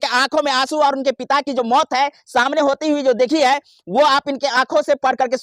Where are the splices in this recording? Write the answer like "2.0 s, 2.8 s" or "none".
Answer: none